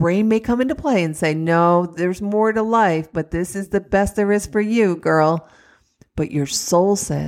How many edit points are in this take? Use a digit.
0